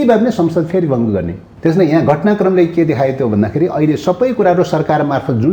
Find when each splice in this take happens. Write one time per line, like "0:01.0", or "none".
0:01.4